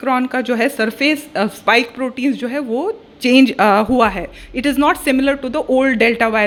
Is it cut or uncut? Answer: uncut